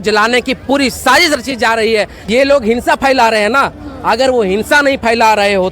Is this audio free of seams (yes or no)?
no